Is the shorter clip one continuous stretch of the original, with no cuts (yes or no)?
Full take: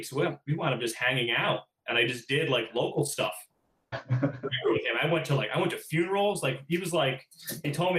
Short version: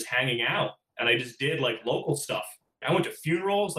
no